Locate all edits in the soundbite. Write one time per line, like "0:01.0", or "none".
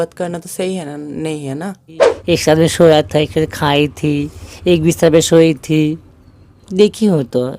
0:02.1